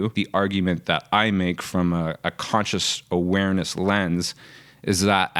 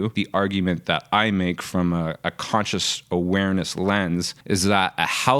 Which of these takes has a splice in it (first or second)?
second